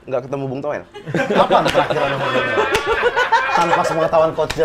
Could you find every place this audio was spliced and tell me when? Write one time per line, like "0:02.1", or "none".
none